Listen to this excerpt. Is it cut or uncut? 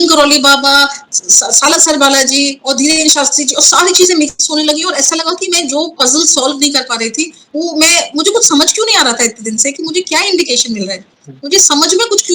uncut